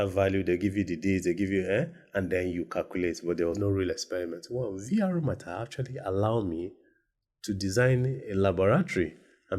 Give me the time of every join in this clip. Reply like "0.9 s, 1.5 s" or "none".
3.6 s